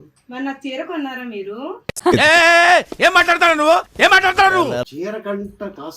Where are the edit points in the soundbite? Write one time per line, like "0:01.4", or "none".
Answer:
0:04.9